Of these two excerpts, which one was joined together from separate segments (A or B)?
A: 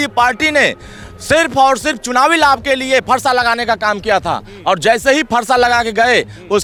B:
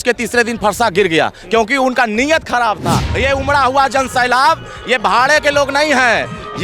B